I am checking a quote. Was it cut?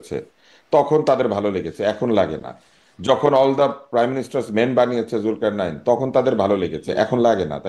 no; 0 cuts

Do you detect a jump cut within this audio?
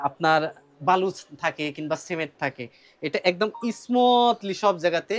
no; 0 cuts

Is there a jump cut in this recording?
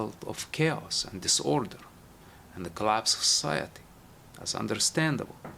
no; 0 cuts

